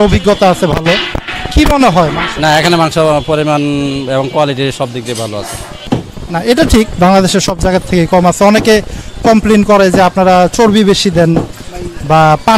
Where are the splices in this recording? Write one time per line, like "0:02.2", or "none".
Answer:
0:05.7